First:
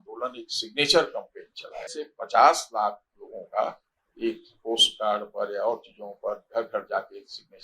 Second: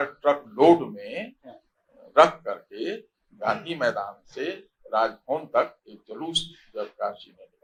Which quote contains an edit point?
first; 1 cut; at 2.0 s

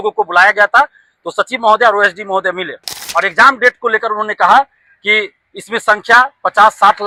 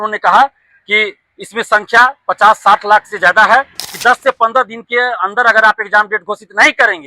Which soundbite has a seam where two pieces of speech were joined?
second; 1 cut; at 3.8 s

